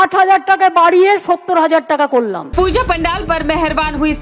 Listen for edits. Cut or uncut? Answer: cut